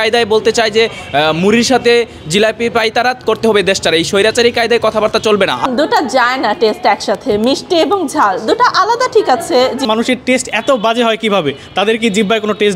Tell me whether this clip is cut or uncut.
cut